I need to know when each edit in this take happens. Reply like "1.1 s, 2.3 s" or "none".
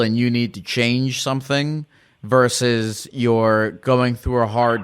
none